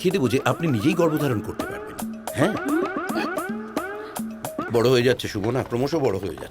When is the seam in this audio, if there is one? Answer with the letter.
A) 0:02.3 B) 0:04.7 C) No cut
B